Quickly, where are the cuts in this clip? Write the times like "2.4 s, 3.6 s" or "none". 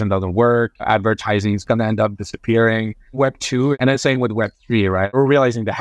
1.6 s, 3.2 s, 5.1 s